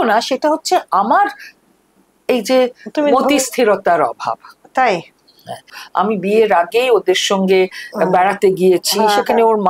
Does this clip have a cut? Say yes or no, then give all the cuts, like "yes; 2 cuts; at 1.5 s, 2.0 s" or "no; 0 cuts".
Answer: yes; 1 cut; at 5.8 s